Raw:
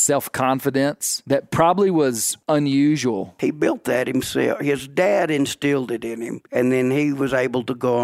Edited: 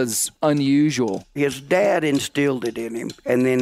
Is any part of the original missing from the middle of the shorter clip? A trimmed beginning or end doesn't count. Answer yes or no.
yes